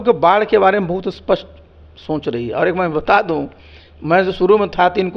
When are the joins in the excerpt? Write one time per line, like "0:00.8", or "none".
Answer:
none